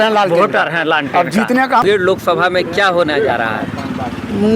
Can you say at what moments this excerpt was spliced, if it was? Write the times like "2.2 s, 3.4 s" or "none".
1.8 s